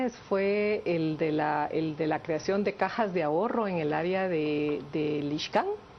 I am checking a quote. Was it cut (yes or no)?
no